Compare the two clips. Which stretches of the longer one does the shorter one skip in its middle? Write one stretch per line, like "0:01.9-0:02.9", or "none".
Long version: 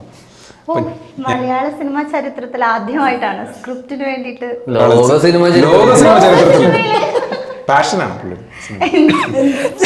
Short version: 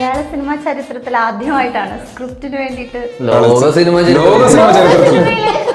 none